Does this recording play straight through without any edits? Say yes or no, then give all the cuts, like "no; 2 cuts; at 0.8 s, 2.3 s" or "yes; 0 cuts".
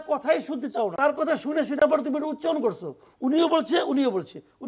no; 1 cut; at 0.9 s